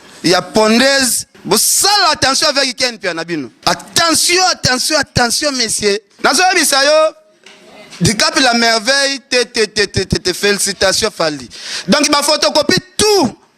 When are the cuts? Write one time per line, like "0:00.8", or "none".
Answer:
0:01.3
0:03.5
0:06.1

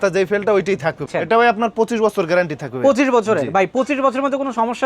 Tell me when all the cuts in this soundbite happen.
0:01.0

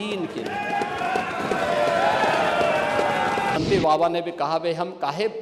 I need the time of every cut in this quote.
0:03.6

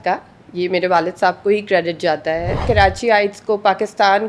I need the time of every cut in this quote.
0:02.6

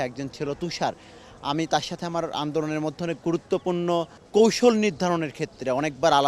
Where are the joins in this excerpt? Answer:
0:04.2

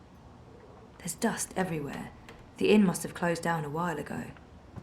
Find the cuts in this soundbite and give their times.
0:01.0
0:02.5

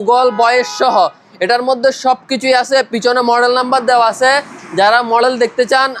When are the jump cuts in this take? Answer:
none

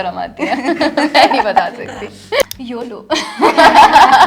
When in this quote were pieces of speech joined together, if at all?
0:02.4

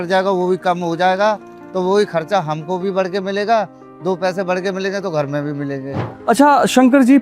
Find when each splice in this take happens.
none

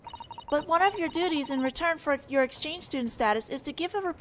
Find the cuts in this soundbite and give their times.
0:03.0

